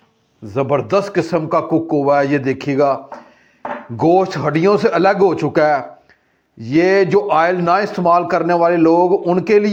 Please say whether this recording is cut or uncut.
uncut